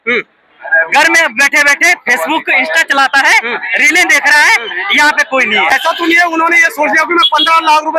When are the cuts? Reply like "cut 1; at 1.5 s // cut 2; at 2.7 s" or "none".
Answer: cut 1; at 5.7 s